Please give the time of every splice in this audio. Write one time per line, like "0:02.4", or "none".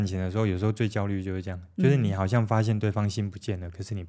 none